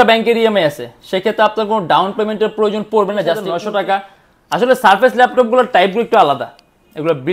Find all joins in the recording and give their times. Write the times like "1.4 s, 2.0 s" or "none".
3.5 s